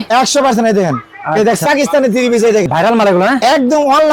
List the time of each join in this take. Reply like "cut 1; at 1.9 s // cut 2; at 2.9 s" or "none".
cut 1; at 1.6 s // cut 2; at 2.7 s